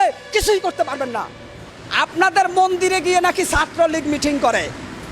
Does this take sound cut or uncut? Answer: cut